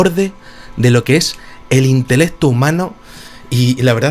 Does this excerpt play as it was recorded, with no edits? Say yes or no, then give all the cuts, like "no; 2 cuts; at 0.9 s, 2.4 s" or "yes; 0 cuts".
no; 1 cut; at 2.2 s